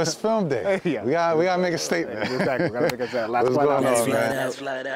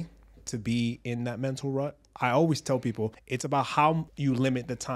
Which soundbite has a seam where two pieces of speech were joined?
second; 3 cuts; at 2.0 s, 3.3 s, 4.1 s

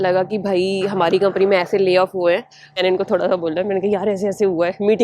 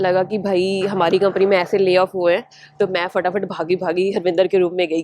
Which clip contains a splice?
first; 1 cut; at 2.8 s

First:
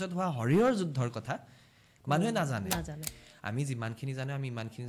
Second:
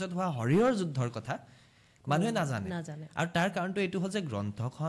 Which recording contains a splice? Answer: first; 1 cut; at 3.1 s

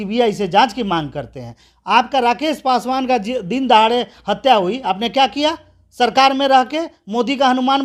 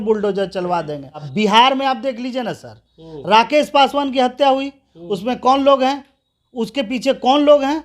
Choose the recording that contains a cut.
second; 1 cut; at 1.3 s

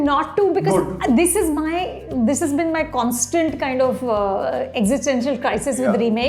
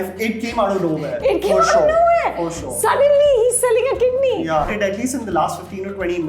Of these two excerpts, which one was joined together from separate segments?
second; 1 cut; at 4.7 s

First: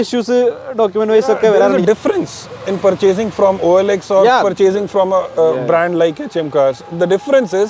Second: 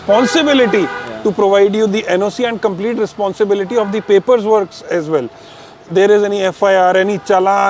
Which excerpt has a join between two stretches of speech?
first; 1 cut; at 1.8 s

